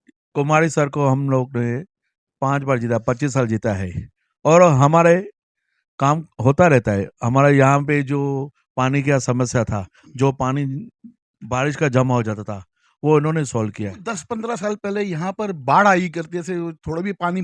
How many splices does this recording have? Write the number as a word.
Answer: zero